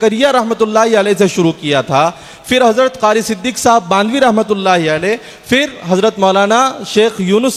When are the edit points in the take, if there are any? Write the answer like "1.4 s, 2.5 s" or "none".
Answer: none